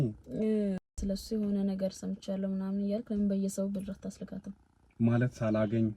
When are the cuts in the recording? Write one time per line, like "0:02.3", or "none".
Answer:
0:01.0